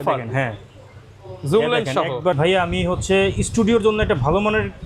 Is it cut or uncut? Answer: cut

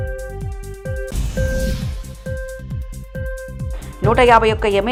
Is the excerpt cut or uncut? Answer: uncut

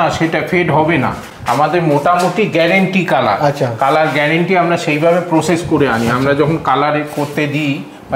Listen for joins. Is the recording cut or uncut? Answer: uncut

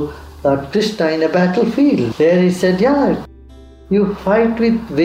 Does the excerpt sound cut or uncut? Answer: cut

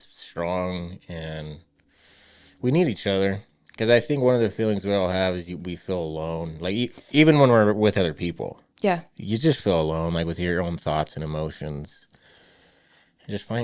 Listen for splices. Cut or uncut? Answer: uncut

